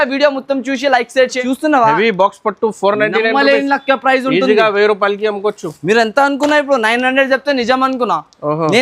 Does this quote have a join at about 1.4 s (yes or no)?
yes